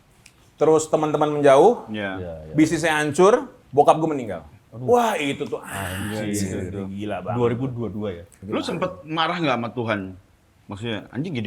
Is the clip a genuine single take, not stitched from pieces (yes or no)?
no